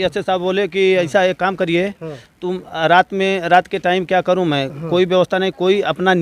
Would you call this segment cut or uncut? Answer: uncut